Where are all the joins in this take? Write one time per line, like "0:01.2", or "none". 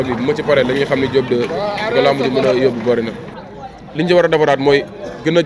0:03.3